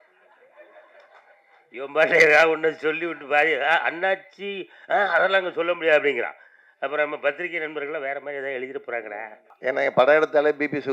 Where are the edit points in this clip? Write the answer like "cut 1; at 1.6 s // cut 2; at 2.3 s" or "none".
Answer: cut 1; at 9.4 s